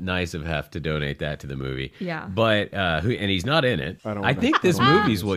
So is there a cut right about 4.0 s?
yes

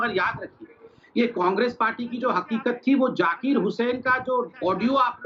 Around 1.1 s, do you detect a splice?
no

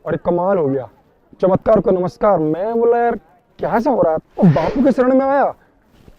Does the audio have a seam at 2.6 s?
no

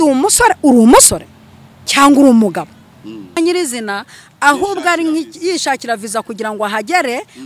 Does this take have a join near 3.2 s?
yes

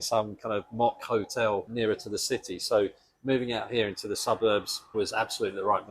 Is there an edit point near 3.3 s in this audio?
no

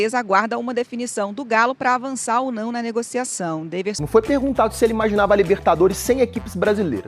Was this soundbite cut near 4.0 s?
yes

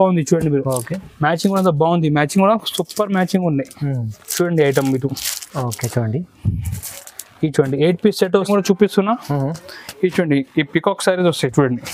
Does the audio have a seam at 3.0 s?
no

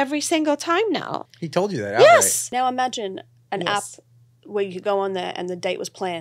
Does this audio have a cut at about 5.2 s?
no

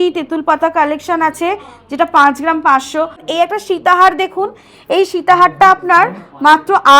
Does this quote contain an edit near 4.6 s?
no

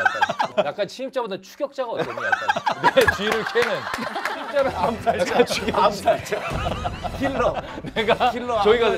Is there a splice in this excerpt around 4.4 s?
yes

